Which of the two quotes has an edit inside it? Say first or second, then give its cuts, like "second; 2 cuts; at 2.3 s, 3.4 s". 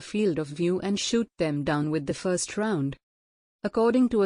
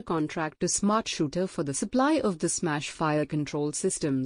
first; 1 cut; at 3.3 s